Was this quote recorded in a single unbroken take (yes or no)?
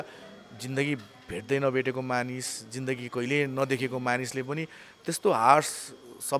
yes